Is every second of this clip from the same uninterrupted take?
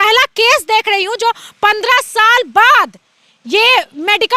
yes; 0 cuts

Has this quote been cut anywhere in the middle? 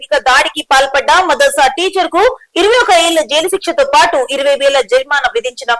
no; 0 cuts

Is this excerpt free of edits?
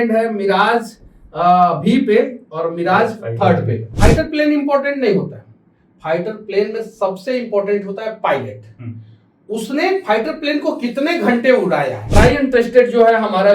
no; 2 cuts; at 3.9 s, 12.2 s

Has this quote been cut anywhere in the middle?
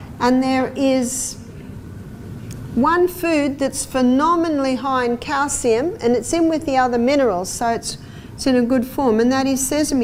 no; 0 cuts

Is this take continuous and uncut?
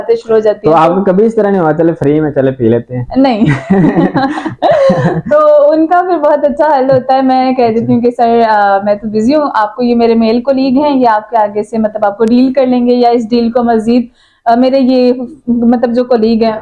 yes; 0 cuts

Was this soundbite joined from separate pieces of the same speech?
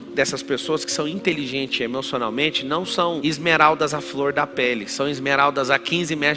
no; 0 cuts

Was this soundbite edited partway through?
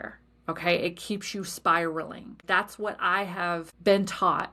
yes; 2 cuts; at 2.4 s, 3.7 s

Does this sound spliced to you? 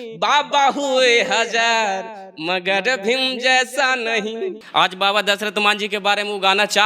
yes; 1 cut; at 4.6 s

